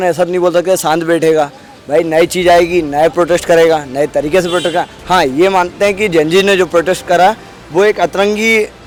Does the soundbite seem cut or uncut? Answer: uncut